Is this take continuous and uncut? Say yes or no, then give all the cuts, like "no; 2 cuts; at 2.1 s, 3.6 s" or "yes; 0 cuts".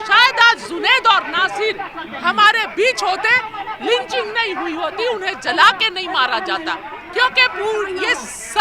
no; 1 cut; at 7.0 s